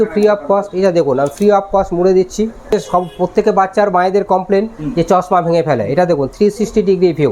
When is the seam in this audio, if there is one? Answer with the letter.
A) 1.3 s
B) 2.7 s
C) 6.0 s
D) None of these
B